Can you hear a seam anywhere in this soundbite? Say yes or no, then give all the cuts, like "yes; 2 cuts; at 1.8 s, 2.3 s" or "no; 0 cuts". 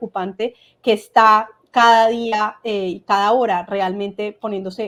no; 0 cuts